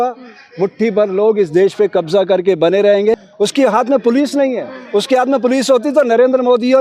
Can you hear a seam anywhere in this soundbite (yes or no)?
yes